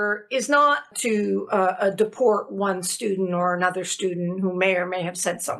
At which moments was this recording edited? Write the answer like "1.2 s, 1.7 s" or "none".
0.9 s